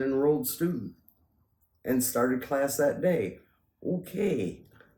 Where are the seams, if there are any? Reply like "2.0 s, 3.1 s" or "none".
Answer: none